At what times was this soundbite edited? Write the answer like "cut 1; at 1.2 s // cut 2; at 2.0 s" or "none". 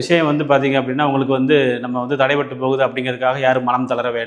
none